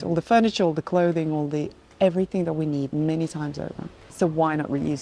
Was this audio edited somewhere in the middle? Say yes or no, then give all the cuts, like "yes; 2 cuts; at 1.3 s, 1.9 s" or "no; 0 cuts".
yes; 1 cut; at 4.1 s